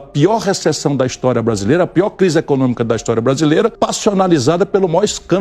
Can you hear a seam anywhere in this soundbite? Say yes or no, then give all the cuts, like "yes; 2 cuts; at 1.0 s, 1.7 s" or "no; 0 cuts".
yes; 1 cut; at 3.7 s